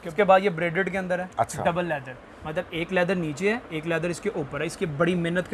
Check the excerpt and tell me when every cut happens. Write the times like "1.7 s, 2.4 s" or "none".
none